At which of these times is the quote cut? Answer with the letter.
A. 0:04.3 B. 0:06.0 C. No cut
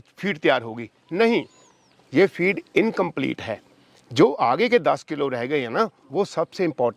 C